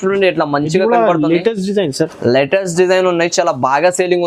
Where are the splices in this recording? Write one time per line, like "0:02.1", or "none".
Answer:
none